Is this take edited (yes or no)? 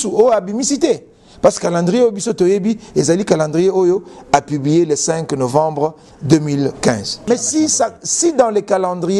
yes